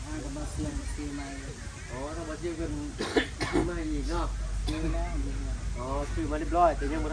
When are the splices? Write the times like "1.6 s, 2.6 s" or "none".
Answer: none